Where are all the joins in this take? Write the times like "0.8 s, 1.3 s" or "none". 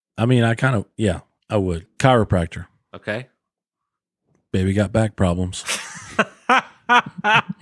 1.8 s